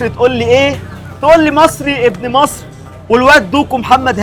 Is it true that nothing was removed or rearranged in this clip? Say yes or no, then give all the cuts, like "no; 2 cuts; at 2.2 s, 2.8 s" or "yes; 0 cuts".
yes; 0 cuts